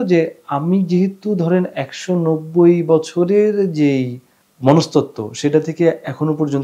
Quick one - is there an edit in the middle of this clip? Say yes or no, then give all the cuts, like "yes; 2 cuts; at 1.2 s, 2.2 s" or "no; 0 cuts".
no; 0 cuts